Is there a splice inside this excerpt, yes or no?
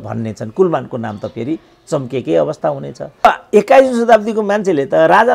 yes